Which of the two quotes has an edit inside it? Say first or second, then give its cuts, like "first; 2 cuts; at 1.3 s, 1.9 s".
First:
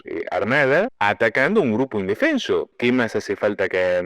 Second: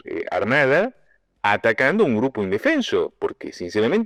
first; 2 cuts; at 0.9 s, 2.7 s